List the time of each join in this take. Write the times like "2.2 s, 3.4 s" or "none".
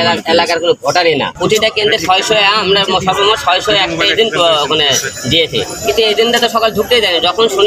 1.3 s